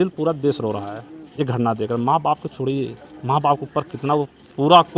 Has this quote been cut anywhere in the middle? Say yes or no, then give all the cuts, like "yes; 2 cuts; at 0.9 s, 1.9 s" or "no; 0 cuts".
no; 0 cuts